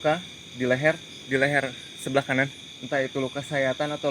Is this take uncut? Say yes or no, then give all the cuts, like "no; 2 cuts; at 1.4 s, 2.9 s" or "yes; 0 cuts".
no; 2 cuts; at 1.1 s, 2.7 s